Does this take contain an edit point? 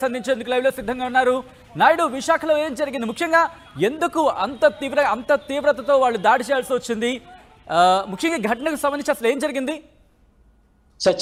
no; 0 cuts

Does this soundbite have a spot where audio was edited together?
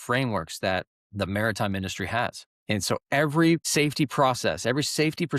yes; 3 cuts; at 1.0 s, 2.5 s, 3.7 s

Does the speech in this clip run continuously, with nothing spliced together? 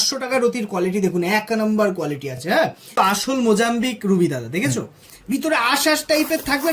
no; 1 cut; at 2.4 s

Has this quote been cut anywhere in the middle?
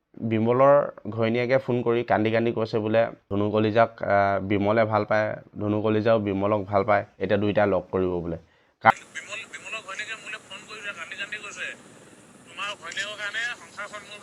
yes; 2 cuts; at 3.3 s, 8.9 s

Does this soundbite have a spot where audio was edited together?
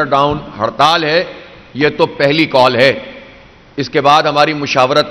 no; 0 cuts

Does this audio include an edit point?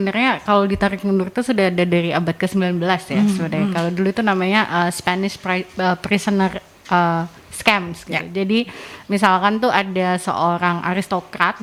no; 0 cuts

